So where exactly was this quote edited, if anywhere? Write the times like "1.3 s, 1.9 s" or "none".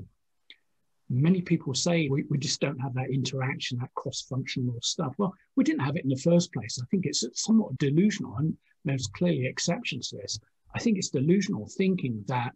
2.1 s, 7.7 s